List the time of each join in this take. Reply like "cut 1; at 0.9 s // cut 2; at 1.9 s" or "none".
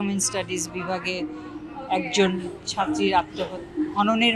none